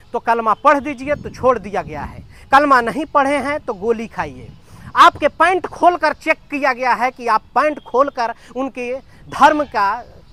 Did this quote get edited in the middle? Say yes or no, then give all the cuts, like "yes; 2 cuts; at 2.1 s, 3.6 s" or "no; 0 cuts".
no; 0 cuts